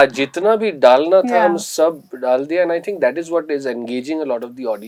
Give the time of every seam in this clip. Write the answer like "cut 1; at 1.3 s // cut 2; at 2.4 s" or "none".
none